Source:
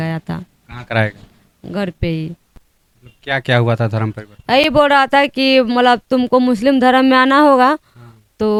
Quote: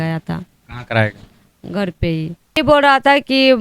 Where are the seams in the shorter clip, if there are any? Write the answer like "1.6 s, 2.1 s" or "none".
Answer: 2.6 s